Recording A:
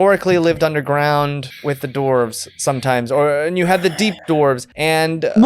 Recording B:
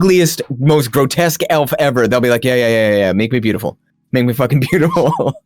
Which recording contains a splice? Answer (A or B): A